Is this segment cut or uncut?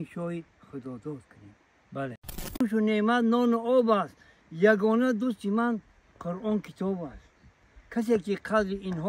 cut